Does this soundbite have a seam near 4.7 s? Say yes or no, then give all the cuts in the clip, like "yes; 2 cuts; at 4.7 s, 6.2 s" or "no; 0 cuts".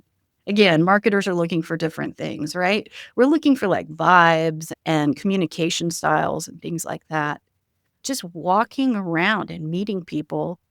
yes; 2 cuts; at 4.7 s, 8.0 s